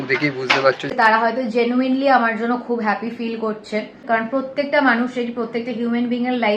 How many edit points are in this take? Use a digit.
2